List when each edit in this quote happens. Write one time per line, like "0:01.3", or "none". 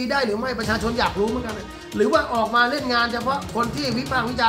none